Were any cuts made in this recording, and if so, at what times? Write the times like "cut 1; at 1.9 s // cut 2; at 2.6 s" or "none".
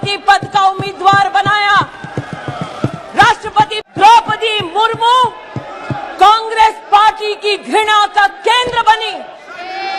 cut 1; at 3.8 s